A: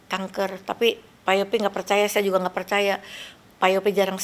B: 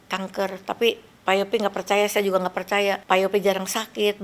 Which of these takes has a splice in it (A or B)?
B